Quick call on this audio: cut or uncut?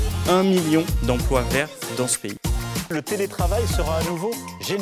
uncut